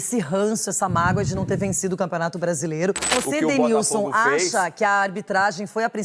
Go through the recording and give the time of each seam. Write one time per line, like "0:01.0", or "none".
0:03.1